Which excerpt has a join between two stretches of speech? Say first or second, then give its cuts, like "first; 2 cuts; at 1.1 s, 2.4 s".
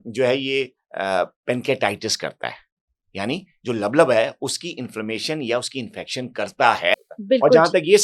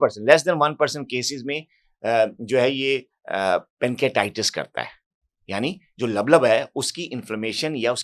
first; 1 cut; at 6.9 s